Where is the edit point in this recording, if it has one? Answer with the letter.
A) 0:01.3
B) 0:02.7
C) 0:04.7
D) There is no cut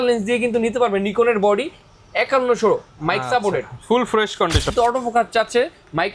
C